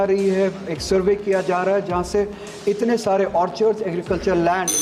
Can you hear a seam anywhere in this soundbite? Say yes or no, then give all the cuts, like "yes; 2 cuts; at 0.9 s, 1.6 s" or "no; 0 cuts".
no; 0 cuts